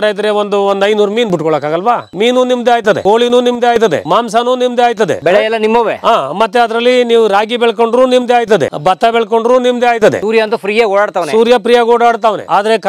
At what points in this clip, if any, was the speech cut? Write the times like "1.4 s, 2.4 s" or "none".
none

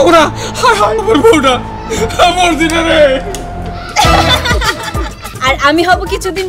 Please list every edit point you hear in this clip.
5.2 s

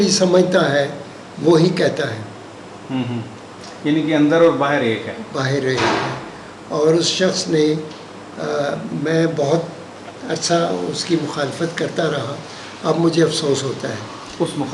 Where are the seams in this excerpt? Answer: none

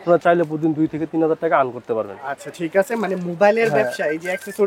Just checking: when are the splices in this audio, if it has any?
none

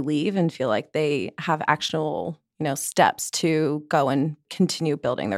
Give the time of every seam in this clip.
4.4 s

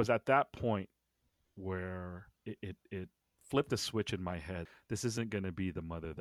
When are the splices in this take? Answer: 2.3 s, 4.7 s

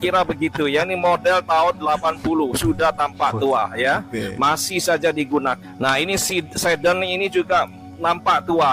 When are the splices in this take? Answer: none

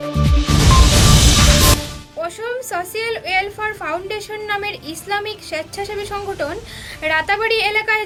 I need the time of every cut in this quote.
none

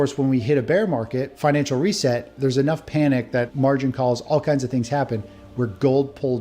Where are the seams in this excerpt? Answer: 1.3 s, 3.5 s

